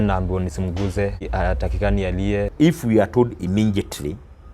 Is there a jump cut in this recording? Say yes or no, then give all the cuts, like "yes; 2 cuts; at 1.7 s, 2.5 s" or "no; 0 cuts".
yes; 2 cuts; at 1.2 s, 2.5 s